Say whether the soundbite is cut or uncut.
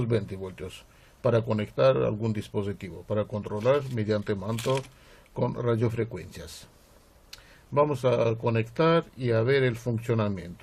cut